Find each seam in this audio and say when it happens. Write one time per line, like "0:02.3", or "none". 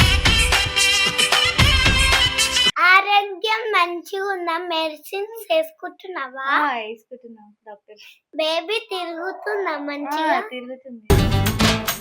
0:02.7